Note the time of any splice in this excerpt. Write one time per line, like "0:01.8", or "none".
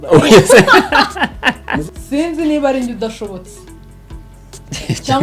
0:01.9